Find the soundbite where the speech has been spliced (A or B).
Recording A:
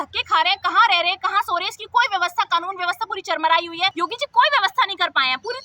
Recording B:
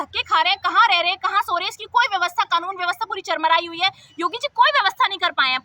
A